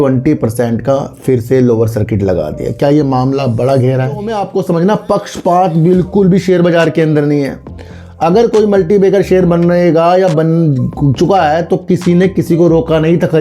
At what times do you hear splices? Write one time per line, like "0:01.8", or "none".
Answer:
0:04.4